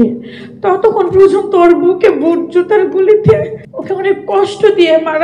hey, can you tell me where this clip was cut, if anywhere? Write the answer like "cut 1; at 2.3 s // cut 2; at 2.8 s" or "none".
cut 1; at 3.7 s